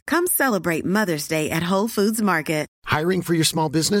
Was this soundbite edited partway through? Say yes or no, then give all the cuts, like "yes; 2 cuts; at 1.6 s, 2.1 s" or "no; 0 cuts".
yes; 1 cut; at 2.7 s